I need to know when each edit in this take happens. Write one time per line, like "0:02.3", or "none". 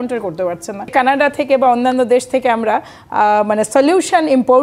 0:00.9